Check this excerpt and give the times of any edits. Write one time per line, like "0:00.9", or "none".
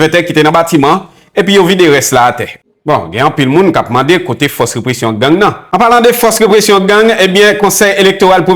0:05.6